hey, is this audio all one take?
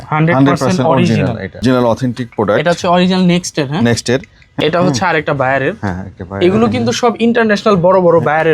no; 2 cuts; at 1.6 s, 4.4 s

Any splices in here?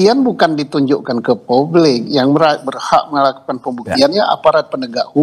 no; 0 cuts

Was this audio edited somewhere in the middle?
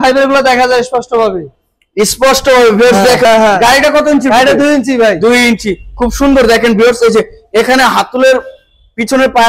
yes; 1 cut; at 3.2 s

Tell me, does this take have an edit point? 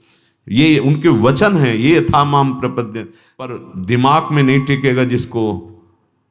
yes; 1 cut; at 3.5 s

